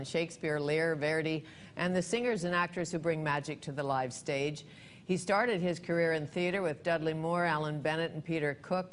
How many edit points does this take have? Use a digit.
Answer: 0